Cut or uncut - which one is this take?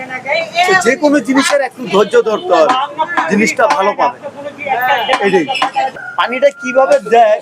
cut